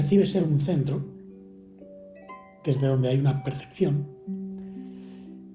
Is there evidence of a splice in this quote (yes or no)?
no